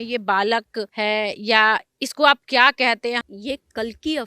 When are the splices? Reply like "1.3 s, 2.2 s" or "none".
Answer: 0.9 s, 3.2 s